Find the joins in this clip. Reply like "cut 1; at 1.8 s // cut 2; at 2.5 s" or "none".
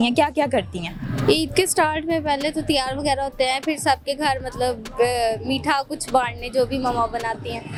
none

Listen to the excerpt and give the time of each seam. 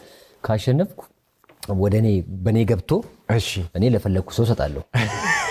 none

